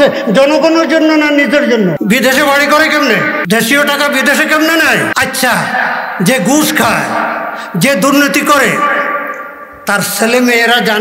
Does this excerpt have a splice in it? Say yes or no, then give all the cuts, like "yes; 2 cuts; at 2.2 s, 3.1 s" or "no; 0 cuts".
yes; 3 cuts; at 2.0 s, 3.4 s, 5.1 s